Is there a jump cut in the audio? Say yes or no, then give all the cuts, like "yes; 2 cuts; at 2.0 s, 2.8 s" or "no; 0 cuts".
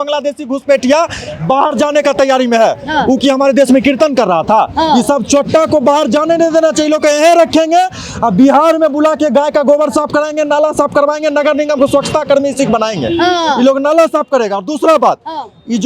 no; 0 cuts